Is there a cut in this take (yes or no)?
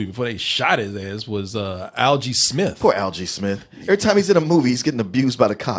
no